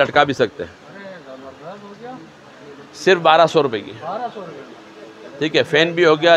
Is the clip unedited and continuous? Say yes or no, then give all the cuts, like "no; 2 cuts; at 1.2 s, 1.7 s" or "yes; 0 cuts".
yes; 0 cuts